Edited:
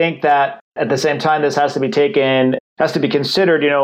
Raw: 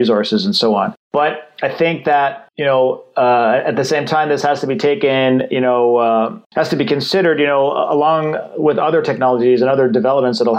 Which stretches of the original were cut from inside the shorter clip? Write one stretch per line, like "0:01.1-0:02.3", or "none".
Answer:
0:02.6-0:03.6
0:05.5-0:06.4